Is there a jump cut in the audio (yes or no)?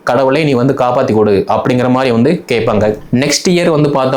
yes